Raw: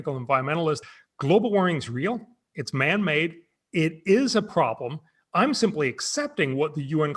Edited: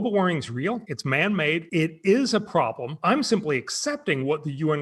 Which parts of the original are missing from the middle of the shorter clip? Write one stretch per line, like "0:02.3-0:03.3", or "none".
0:02.3-0:02.6
0:03.3-0:03.7
0:04.9-0:05.2

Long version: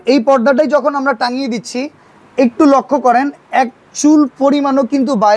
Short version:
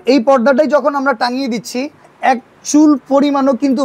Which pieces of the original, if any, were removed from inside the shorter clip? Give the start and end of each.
0:02.1-0:03.4

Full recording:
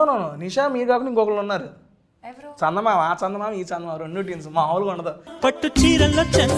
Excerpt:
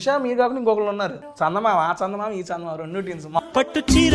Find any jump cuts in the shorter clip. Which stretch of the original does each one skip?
0:01.7-0:02.4
0:04.6-0:05.3

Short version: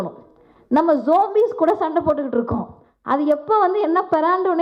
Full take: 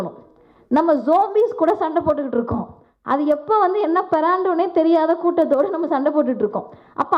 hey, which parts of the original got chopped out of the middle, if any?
none

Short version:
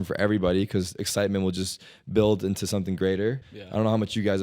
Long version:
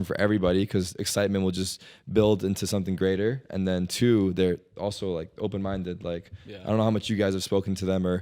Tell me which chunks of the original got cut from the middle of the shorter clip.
0:03.4-0:06.4

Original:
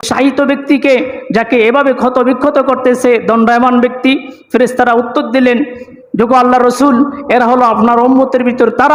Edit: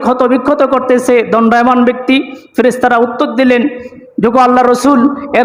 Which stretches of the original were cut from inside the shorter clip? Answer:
none

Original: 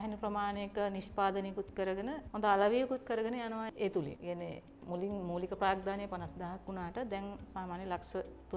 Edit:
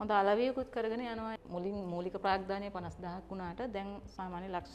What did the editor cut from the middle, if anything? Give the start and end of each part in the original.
0:03.7-0:04.7

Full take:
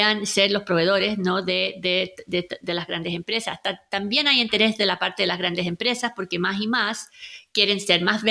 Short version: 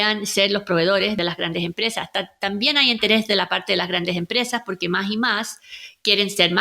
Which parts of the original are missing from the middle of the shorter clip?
0:01.2-0:02.7

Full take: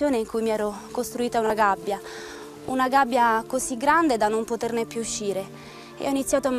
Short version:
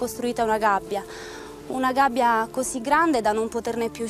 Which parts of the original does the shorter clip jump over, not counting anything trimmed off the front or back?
none

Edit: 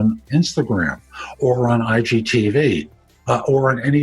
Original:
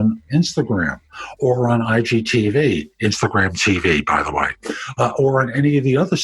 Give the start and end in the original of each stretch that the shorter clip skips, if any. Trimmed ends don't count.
0:02.9-0:04.6

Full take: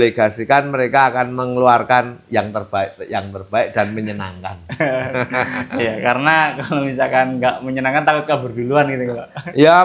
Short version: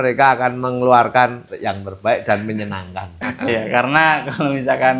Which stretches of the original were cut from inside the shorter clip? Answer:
0:02.2-0:03.0
0:04.7-0:05.5

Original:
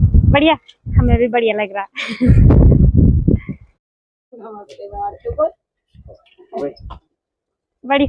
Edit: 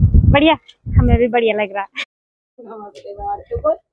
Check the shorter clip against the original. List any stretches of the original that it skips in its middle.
0:02.0-0:03.7

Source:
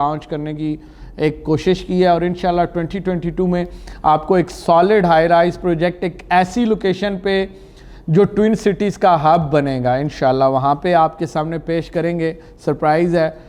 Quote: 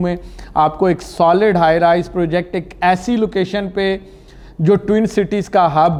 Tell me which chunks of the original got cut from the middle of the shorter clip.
none

